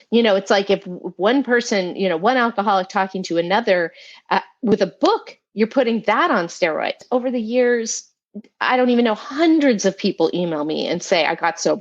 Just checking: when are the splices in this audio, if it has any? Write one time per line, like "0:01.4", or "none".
0:07.0